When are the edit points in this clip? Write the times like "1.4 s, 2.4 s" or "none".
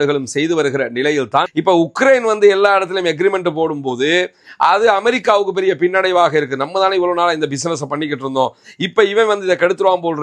1.5 s